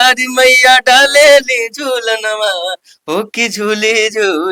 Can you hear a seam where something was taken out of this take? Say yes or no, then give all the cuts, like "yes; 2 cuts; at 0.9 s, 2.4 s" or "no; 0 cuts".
no; 0 cuts